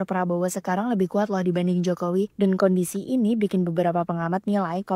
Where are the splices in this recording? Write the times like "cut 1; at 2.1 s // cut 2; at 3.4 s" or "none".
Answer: none